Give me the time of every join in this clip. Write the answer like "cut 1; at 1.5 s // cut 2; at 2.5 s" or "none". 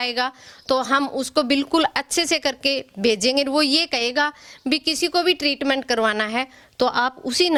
none